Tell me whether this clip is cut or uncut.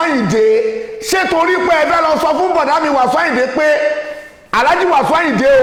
uncut